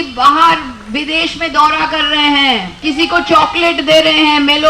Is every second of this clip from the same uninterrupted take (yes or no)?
no